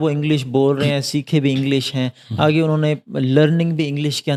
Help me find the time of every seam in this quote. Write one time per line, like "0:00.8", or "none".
none